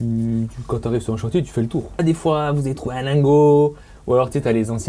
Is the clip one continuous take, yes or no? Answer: no